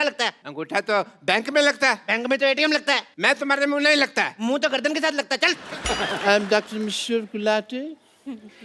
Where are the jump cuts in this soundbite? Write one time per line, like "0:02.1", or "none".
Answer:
0:03.1
0:05.7